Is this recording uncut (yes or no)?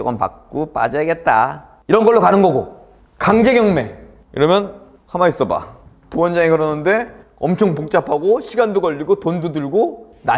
no